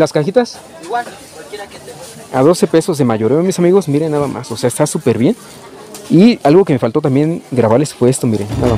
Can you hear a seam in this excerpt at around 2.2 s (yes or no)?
no